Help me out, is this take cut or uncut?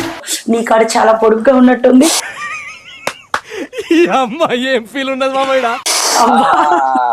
uncut